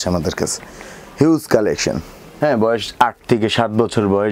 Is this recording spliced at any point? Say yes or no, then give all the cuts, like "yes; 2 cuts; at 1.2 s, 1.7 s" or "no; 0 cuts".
yes; 1 cut; at 2.2 s